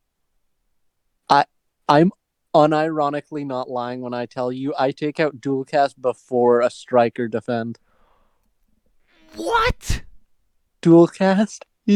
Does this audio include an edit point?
no; 0 cuts

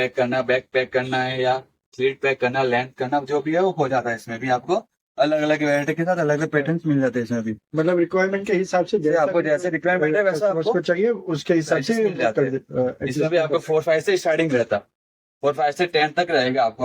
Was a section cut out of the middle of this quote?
no; 0 cuts

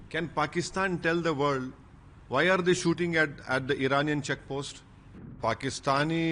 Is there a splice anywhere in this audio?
yes; 1 cut; at 5.4 s

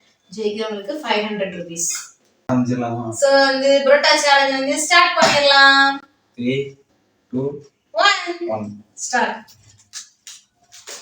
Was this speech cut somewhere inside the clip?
yes; 1 cut; at 2.5 s

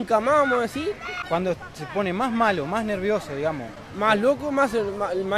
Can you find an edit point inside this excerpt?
yes; 1 cut; at 1.1 s

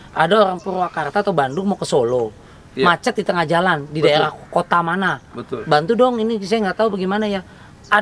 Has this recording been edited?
no; 0 cuts

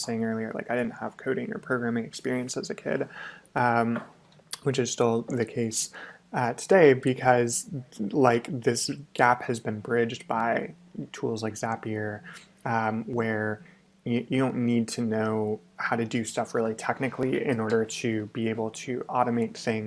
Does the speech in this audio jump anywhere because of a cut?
no; 0 cuts

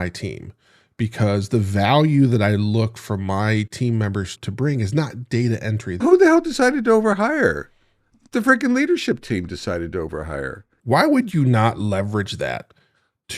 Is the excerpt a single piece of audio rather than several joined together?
no; 3 cuts; at 4.3 s, 6.0 s, 10.7 s

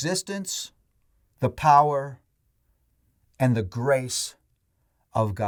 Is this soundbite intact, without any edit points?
yes; 0 cuts

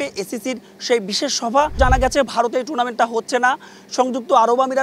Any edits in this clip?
yes; 1 cut; at 1.8 s

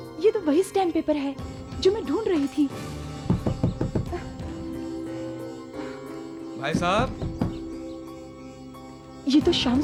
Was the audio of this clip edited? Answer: no; 0 cuts

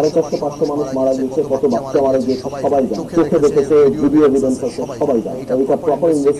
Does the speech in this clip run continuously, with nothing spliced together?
no; 2 cuts; at 3.0 s, 5.4 s

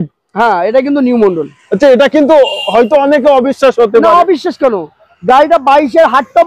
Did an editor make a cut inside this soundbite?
no; 0 cuts

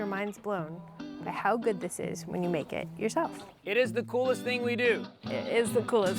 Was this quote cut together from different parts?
yes; 2 cuts; at 3.5 s, 5.2 s

